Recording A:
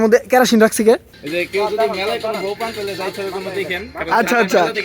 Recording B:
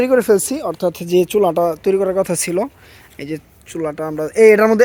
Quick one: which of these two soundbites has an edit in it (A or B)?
A